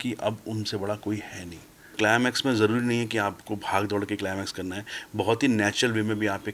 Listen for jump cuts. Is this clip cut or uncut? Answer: cut